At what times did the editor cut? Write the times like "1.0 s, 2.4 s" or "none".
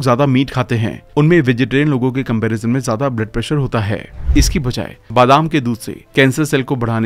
4.2 s

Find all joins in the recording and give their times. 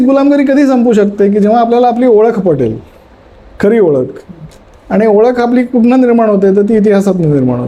none

